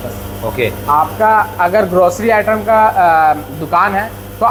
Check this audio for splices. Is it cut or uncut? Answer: uncut